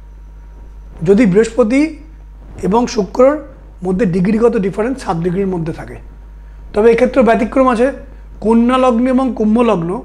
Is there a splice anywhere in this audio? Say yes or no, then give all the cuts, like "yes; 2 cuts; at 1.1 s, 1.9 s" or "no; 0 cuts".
no; 0 cuts